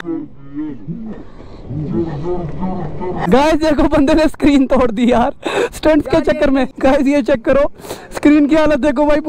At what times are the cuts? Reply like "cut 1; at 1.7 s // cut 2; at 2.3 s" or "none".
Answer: cut 1; at 3.2 s